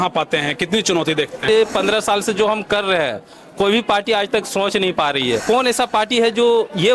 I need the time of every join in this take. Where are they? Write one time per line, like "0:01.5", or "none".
0:01.4
0:05.4